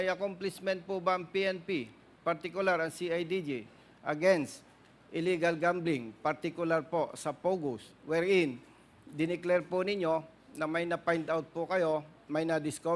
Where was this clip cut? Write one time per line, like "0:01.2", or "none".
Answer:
none